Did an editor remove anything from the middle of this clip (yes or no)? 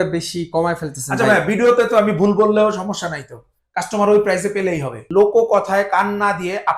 yes